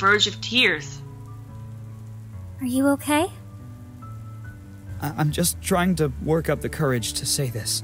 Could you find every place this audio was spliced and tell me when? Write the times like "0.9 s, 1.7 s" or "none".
none